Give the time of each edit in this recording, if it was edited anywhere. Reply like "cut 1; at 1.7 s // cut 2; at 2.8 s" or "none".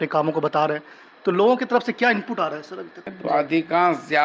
cut 1; at 3.2 s